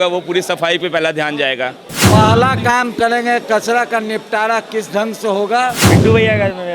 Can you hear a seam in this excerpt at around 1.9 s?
yes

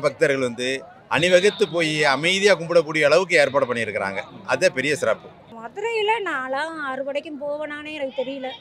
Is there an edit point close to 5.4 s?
yes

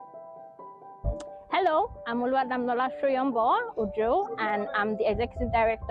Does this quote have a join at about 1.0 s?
yes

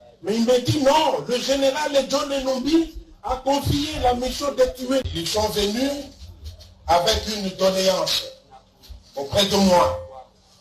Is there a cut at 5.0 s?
yes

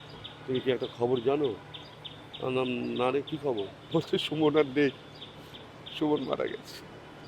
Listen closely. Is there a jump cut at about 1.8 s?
no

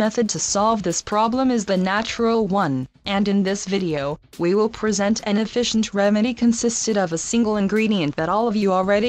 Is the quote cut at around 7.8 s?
no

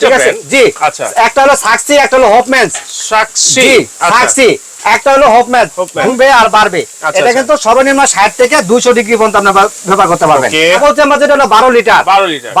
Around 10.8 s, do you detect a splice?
yes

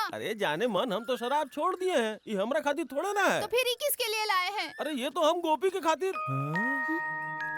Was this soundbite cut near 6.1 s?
no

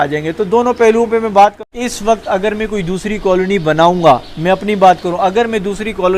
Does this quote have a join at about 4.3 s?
no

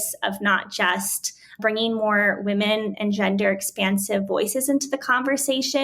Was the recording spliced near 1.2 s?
no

